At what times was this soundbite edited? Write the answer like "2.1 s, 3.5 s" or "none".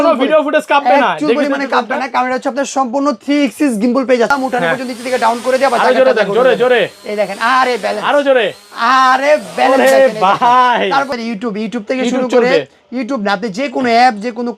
4.3 s, 11.1 s